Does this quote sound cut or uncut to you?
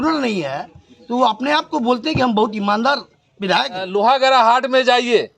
cut